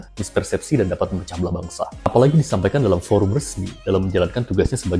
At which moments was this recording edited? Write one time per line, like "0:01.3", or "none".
none

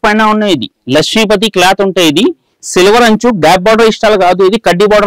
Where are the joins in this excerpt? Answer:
none

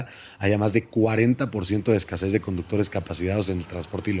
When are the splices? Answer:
none

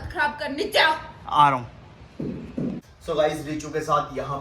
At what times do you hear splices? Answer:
0:02.8

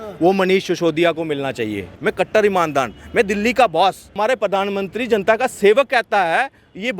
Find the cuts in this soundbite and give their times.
0:01.9
0:04.1

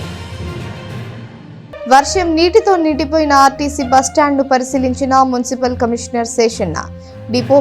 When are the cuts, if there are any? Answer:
0:01.8

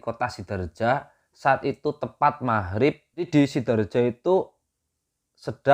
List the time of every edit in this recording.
0:03.3

